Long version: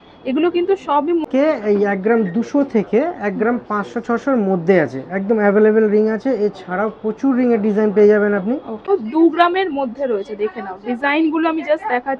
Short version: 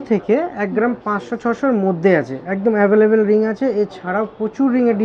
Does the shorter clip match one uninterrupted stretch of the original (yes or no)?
yes